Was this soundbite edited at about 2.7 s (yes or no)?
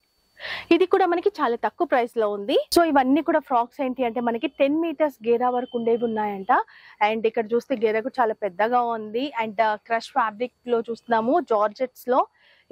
yes